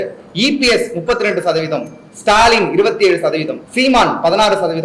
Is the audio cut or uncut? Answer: cut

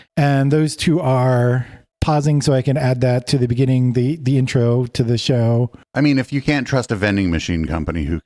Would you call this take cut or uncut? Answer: cut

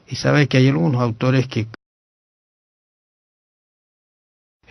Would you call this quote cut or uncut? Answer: uncut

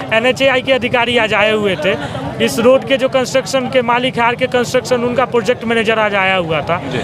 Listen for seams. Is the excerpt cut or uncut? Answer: uncut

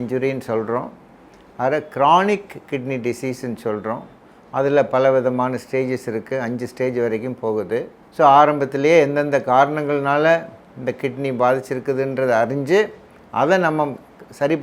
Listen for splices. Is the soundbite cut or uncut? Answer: uncut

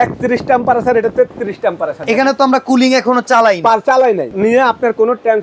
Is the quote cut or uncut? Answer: cut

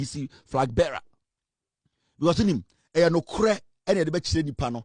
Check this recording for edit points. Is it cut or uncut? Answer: uncut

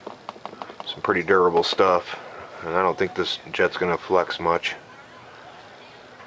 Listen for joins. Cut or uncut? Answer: cut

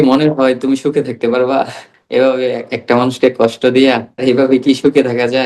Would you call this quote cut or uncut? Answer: cut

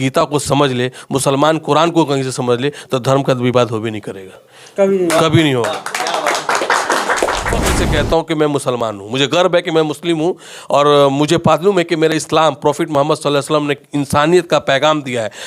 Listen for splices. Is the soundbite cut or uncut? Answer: cut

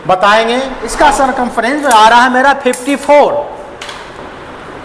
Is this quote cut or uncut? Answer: cut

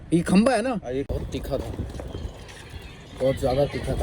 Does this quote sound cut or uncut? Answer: cut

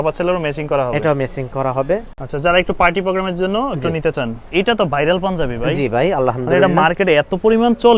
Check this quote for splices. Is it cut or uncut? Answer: cut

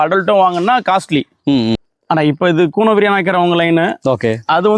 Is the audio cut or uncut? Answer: cut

